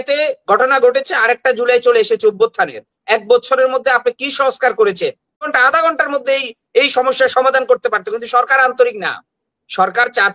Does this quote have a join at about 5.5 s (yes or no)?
yes